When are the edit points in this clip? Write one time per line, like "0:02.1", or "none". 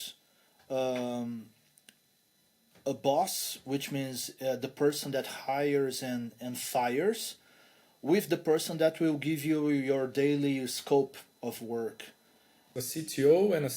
0:12.7